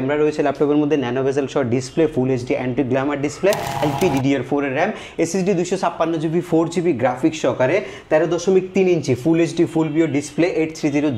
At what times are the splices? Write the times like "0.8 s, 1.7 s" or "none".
3.8 s